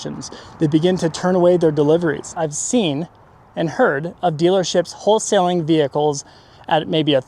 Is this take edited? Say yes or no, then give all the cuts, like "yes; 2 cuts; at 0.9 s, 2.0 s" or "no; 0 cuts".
yes; 1 cut; at 2.3 s